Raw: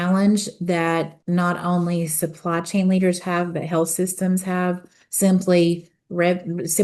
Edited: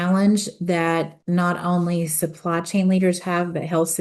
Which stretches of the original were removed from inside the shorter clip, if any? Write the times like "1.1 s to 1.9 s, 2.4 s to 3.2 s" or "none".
none